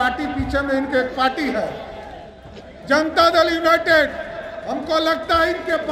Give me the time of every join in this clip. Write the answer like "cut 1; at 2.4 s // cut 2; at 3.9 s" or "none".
none